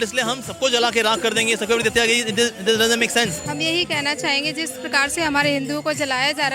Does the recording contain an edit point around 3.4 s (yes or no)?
yes